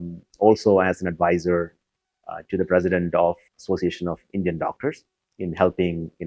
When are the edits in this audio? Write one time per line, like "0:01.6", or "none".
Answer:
0:03.4